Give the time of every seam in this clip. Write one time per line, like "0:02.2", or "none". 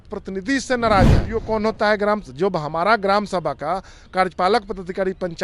0:01.3